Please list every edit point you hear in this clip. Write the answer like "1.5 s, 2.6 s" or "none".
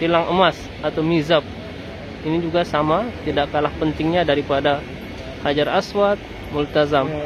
none